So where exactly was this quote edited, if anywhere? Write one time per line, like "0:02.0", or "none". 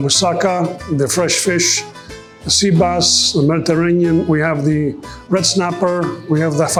none